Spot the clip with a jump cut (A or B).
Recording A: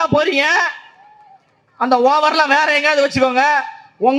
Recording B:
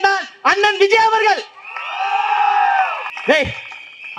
B